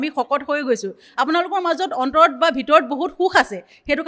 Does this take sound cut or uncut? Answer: uncut